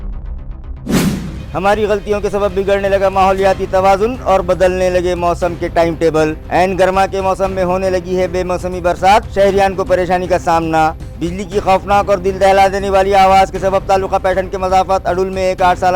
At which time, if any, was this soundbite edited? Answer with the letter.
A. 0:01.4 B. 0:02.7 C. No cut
A